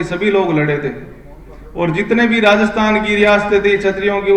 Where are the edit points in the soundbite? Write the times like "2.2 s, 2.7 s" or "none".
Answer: none

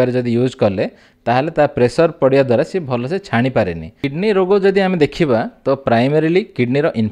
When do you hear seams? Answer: 4.0 s

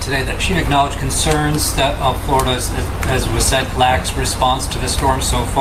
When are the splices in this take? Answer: none

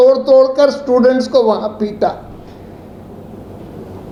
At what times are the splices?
none

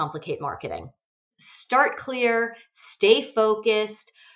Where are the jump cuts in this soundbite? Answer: 1.1 s

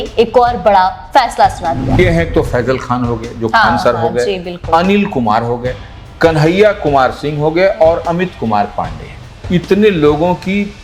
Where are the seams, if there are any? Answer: 2.0 s

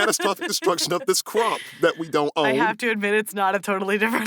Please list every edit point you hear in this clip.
none

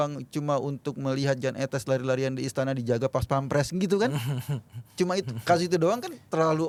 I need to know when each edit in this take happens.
none

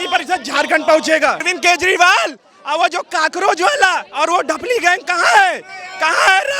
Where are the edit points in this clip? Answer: 1.5 s

